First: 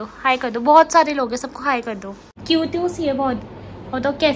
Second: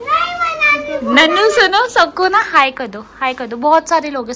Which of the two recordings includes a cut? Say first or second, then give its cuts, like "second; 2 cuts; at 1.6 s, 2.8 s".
first; 1 cut; at 2.4 s